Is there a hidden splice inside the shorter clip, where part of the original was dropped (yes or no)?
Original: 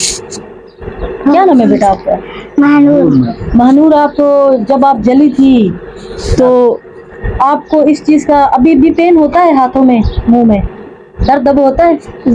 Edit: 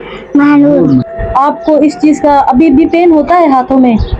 yes